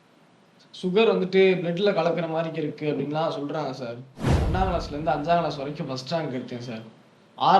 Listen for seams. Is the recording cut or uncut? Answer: cut